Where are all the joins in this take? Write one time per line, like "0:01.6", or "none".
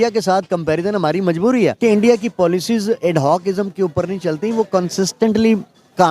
0:01.8